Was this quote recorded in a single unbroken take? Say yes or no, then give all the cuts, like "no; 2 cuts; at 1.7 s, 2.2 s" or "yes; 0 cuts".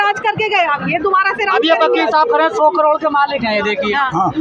yes; 0 cuts